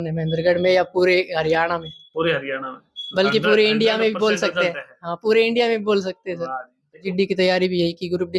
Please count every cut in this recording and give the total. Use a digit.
1